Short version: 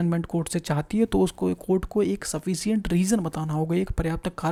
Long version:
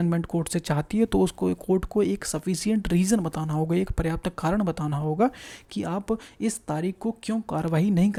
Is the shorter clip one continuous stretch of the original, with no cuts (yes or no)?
yes